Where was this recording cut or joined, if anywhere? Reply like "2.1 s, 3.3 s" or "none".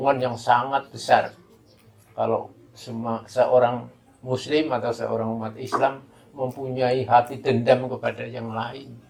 none